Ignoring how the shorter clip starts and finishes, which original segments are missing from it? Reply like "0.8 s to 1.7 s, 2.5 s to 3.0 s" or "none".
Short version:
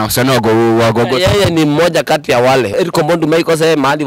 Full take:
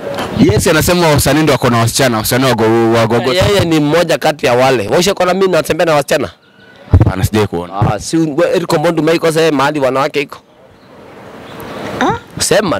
4.9 s to 8.5 s